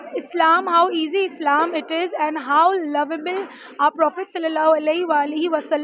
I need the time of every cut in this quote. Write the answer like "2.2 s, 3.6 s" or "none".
none